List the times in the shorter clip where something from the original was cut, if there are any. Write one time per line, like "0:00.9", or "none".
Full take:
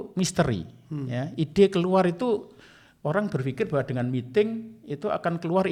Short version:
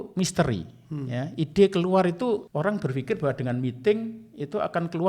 0:02.5